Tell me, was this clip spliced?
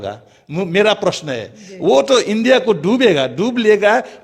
no; 0 cuts

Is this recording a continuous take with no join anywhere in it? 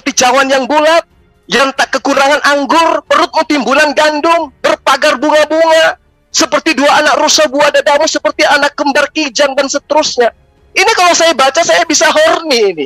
yes; 0 cuts

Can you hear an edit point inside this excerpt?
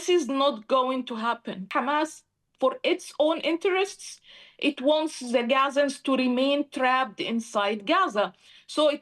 yes; 1 cut; at 1.7 s

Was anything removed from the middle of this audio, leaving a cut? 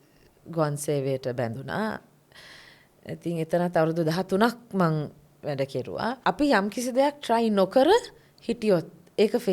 yes; 1 cut; at 6.2 s

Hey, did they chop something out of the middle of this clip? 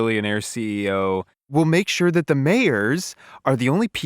yes; 1 cut; at 1.4 s

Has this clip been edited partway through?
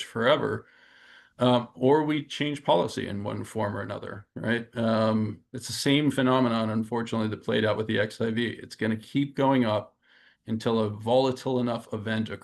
no; 0 cuts

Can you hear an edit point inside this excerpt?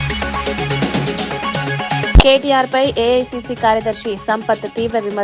yes; 1 cut; at 2.1 s

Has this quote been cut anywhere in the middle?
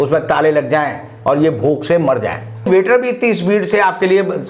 yes; 1 cut; at 2.7 s

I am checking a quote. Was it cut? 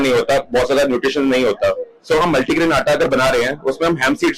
no; 0 cuts

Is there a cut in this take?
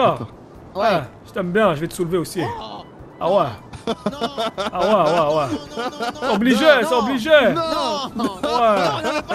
no; 0 cuts

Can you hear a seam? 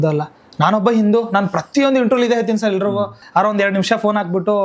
yes; 1 cut; at 3.2 s

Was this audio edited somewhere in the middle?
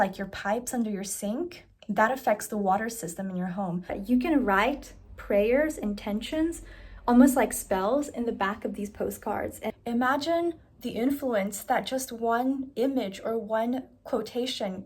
yes; 2 cuts; at 3.9 s, 9.7 s

